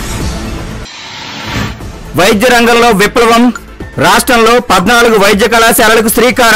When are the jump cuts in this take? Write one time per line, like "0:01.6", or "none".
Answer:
none